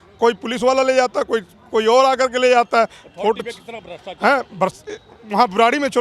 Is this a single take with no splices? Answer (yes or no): yes